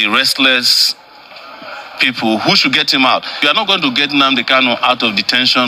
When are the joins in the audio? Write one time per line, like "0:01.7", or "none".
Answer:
0:03.4